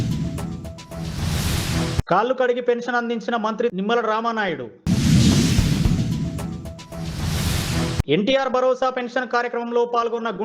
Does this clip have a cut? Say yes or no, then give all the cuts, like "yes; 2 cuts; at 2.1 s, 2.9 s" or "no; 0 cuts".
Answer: no; 0 cuts